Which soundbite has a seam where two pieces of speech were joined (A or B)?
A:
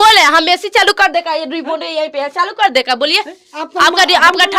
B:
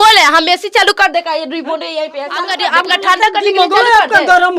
B